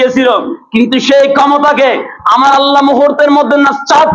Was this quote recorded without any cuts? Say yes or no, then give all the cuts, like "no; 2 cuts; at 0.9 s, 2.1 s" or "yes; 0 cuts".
yes; 0 cuts